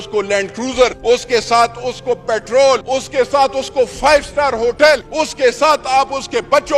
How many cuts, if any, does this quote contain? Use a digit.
3